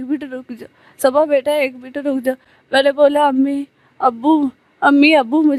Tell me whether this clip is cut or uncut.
uncut